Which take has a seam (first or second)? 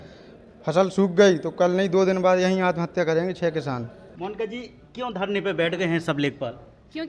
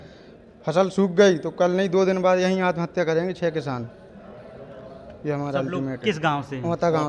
first